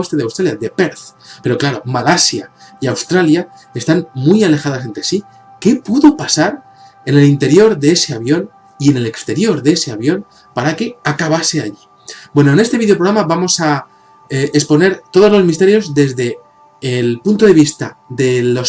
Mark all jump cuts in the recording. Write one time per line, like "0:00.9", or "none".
none